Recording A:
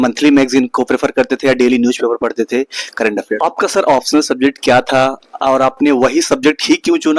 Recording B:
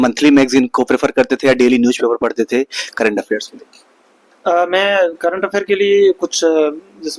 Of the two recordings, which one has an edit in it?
A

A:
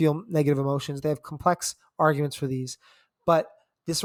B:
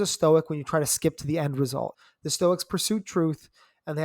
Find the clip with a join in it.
B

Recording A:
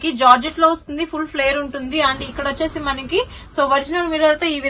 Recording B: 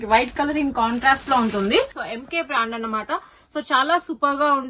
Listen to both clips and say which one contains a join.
B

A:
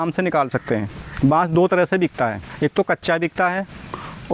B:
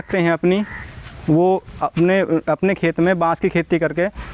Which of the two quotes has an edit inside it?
A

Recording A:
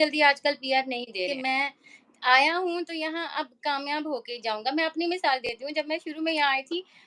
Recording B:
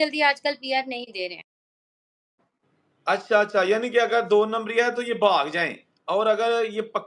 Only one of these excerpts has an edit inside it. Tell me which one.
A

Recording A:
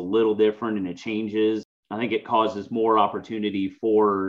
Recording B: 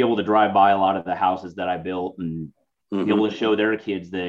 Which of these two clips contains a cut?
A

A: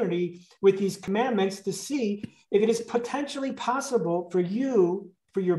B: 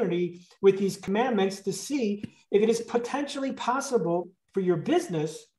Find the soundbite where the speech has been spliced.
B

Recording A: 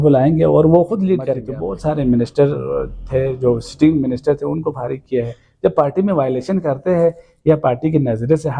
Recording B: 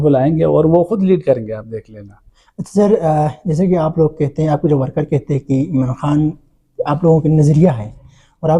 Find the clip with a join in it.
A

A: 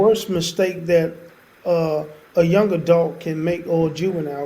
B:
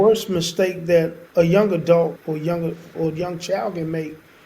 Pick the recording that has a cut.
B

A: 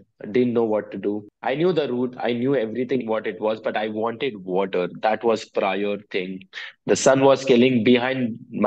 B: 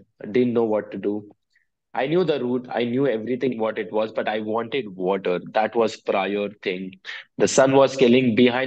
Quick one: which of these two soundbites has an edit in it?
A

